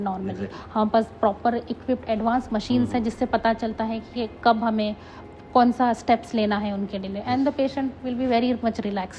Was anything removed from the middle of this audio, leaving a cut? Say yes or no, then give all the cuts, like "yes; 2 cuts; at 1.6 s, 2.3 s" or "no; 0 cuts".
no; 0 cuts